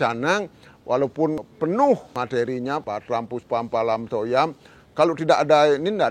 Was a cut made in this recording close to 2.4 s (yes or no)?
yes